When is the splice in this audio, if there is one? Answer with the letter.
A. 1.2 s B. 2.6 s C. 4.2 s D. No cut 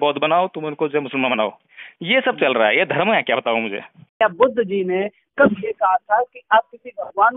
C